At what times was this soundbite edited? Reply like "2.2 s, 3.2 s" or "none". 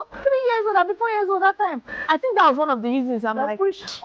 2.1 s